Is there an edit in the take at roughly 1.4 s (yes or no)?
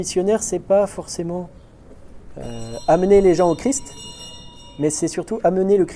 no